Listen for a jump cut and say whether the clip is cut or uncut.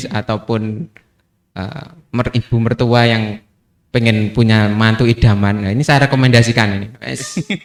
uncut